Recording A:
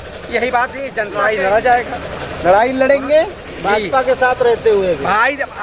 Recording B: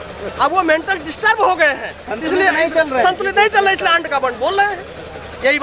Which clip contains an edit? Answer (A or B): A